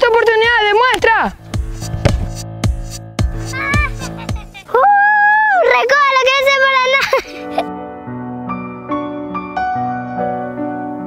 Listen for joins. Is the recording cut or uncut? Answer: uncut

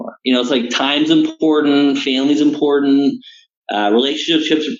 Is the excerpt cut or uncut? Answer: uncut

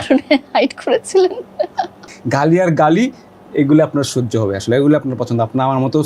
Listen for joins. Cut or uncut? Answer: cut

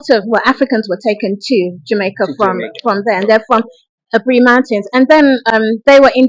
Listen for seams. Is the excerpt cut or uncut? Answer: uncut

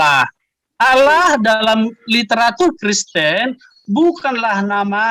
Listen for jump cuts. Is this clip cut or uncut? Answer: uncut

